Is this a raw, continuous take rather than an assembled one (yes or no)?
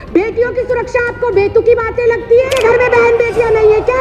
no